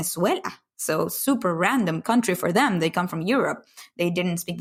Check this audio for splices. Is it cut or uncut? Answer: uncut